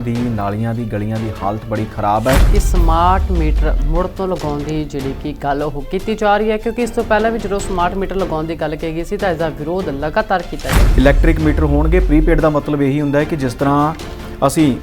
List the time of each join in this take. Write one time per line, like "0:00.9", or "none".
0:02.5
0:10.8